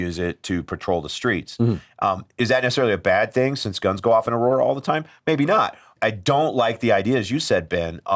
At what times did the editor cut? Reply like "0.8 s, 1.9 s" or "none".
5.9 s